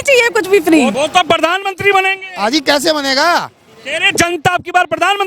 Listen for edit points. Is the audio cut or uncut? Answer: cut